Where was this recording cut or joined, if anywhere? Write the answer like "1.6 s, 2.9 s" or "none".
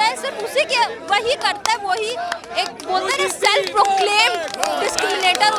none